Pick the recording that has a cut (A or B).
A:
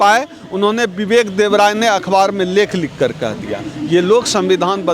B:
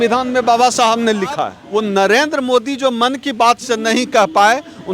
B